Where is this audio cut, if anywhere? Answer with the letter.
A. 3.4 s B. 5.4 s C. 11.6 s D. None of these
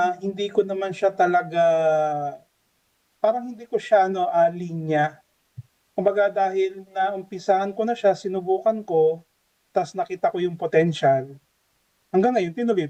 D